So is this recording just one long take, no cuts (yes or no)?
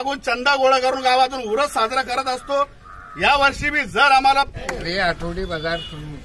no